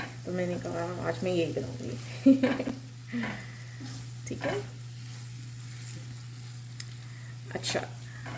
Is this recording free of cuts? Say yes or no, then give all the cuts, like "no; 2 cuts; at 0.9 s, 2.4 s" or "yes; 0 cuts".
yes; 0 cuts